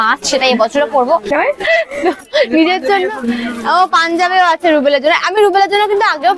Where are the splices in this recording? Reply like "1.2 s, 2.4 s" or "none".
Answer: 1.3 s